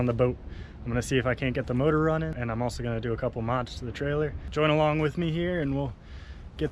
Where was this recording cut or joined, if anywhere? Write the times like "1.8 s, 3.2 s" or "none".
2.4 s, 4.4 s